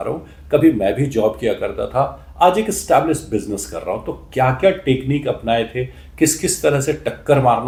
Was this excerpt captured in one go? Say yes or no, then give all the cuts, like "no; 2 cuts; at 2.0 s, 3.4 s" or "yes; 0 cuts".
yes; 0 cuts